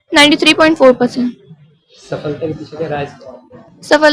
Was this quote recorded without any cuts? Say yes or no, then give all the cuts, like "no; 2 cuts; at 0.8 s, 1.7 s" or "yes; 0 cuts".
yes; 0 cuts